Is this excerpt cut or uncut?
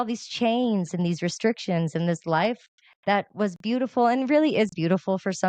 uncut